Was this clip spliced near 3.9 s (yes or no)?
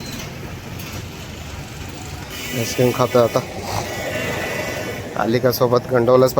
no